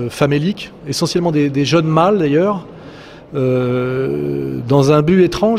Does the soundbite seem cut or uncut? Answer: uncut